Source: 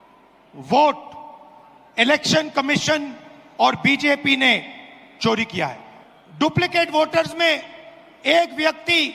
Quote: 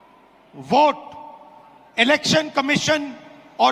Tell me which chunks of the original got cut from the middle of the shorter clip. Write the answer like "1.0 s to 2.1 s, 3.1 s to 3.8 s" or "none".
none